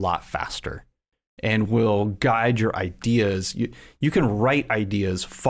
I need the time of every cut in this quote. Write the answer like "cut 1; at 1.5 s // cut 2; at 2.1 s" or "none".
none